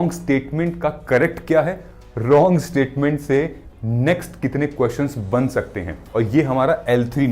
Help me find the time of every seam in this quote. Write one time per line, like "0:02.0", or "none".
0:05.9